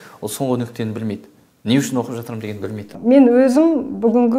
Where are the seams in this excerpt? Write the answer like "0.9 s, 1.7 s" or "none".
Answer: 2.9 s